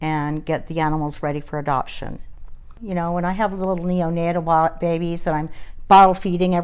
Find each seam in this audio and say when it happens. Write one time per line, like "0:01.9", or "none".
0:02.8